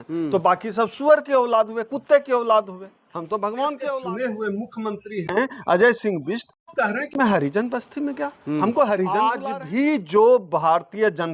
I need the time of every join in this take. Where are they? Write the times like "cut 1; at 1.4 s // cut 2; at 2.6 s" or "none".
cut 1; at 4.0 s // cut 2; at 9.4 s